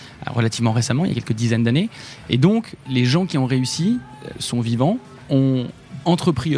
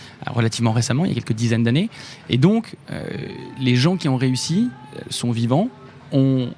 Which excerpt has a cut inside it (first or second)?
first